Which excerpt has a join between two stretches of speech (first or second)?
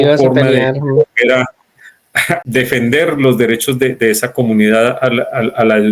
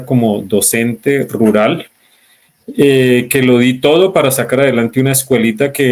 first